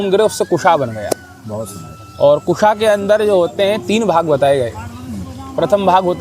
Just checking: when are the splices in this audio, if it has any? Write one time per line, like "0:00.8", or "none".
none